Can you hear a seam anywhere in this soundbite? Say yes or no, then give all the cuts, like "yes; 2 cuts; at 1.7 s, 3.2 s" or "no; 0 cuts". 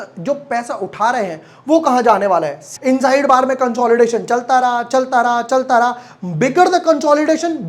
yes; 1 cut; at 2.7 s